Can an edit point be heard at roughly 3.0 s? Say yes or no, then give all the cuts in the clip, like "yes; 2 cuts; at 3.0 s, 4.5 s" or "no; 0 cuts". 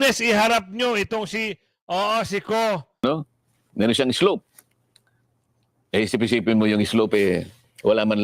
yes; 1 cut; at 3.0 s